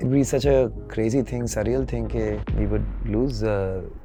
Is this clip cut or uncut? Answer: uncut